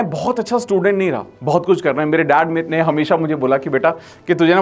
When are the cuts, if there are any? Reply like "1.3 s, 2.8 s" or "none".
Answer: 1.3 s